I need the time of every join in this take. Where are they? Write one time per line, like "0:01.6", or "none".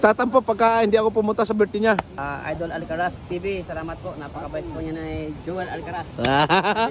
0:02.1